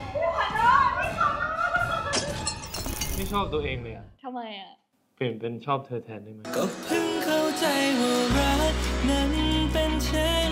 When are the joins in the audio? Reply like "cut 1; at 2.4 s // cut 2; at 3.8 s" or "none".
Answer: cut 1; at 3.2 s

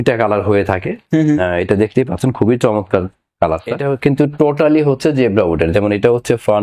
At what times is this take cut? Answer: cut 1; at 3.8 s

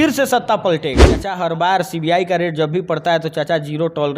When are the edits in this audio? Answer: cut 1; at 1.3 s

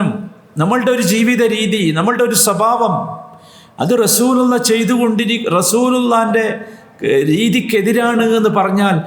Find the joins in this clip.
none

